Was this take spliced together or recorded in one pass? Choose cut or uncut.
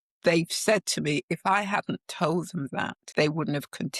cut